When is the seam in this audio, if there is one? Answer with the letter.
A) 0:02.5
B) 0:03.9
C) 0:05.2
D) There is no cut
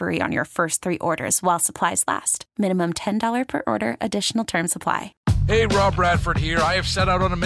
C